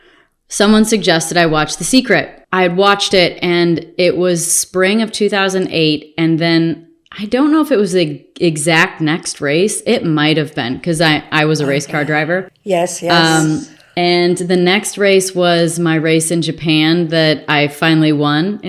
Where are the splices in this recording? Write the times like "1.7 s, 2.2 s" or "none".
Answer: 2.4 s